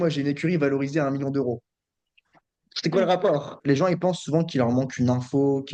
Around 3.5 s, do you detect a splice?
yes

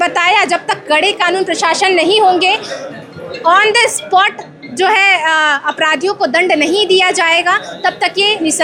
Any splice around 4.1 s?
no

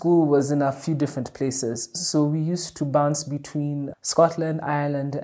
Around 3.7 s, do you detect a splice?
no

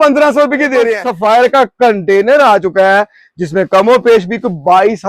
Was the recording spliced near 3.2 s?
no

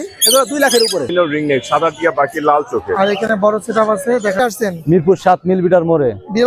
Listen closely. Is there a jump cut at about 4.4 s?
yes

